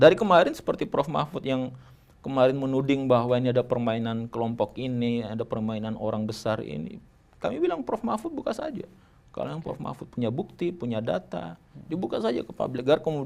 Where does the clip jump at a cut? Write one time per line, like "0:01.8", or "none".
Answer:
none